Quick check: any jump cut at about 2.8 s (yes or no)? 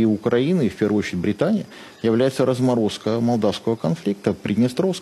no